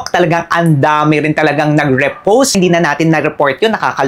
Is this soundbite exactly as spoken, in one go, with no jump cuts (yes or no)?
no